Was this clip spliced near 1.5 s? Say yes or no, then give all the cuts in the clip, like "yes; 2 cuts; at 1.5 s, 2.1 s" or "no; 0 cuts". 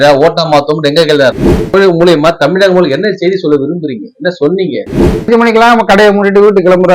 yes; 2 cuts; at 1.5 s, 5.2 s